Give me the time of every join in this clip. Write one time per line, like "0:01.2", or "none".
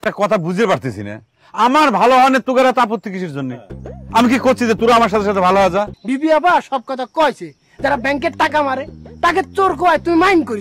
0:06.0